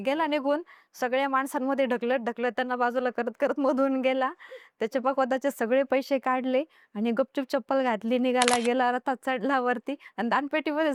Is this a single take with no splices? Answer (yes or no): yes